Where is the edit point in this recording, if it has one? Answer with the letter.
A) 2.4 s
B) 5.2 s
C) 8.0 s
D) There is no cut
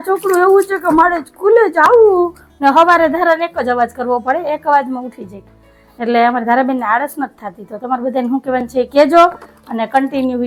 D